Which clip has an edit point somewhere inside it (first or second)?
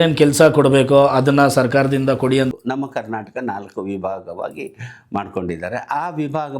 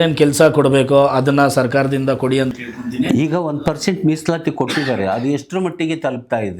first